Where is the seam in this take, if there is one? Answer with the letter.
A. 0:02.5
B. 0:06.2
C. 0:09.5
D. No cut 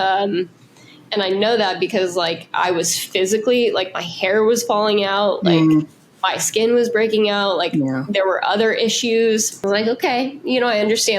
C